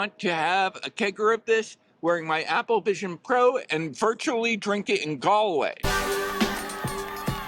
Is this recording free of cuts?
yes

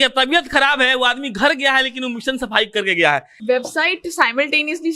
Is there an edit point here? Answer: yes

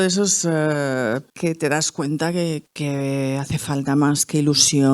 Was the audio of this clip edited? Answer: yes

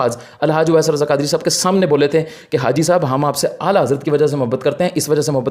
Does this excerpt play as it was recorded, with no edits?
yes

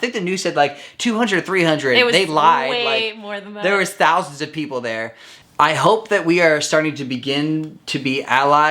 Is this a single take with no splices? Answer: no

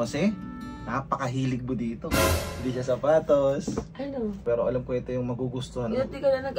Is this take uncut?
no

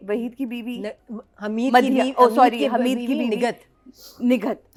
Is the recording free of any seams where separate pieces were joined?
yes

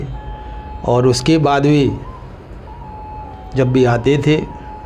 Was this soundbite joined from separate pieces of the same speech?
no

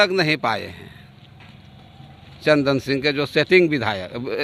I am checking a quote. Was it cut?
no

